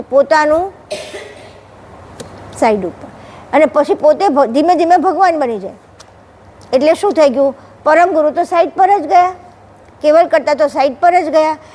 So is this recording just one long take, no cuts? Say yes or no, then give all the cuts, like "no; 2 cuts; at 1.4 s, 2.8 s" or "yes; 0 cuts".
yes; 0 cuts